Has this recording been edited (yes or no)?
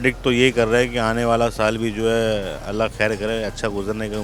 no